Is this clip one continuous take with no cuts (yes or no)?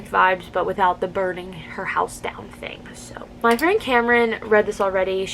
no